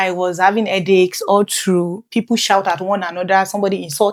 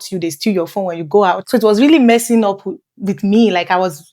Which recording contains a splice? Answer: second; 1 cut; at 1.4 s

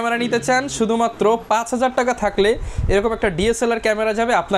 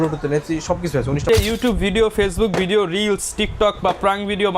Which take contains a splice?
second; 1 cut; at 1.3 s

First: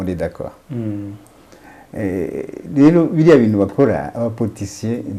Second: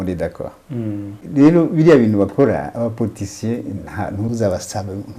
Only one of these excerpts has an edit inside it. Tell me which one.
second; 2 cuts; at 1.2 s, 4.3 s

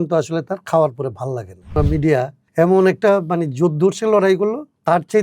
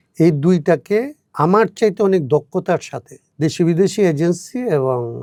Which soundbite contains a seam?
first; 1 cut; at 1.7 s

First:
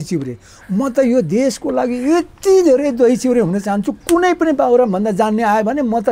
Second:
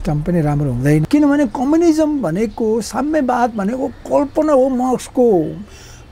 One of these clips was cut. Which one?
second; 1 cut; at 1.1 s

